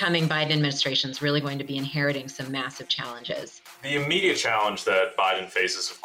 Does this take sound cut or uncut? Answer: cut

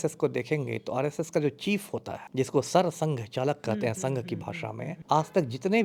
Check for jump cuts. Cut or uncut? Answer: uncut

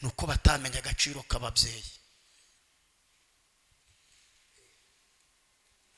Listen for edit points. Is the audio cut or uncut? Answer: uncut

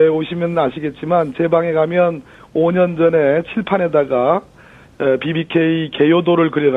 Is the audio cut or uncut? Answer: uncut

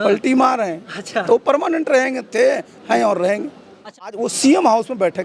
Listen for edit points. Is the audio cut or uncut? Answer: cut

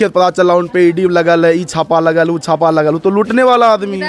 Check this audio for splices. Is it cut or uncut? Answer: uncut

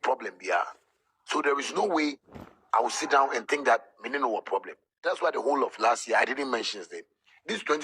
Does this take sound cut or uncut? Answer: uncut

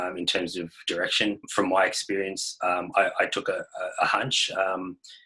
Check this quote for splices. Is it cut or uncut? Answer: cut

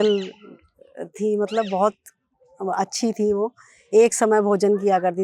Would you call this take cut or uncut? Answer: uncut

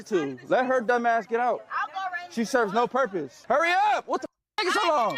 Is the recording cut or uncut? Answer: cut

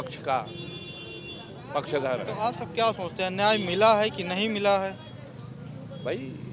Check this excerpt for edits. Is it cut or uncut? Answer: uncut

